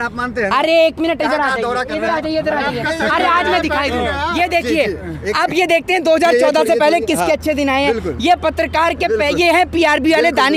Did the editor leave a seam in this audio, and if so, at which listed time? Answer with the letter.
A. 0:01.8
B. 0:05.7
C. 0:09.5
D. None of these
D